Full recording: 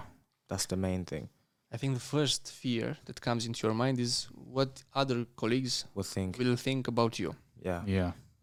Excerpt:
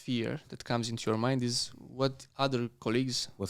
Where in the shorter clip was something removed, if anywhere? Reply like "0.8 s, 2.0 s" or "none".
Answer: none